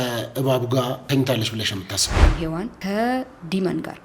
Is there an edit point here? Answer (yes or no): yes